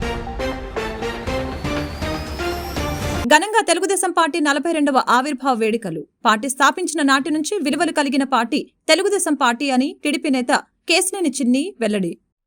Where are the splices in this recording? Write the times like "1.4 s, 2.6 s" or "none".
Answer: 3.2 s